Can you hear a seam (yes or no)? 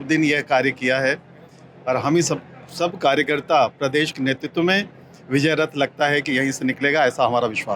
no